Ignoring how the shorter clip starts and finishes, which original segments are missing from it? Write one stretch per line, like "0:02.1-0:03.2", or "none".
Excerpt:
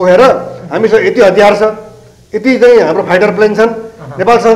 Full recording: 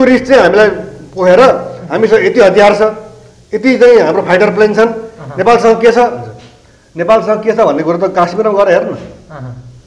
none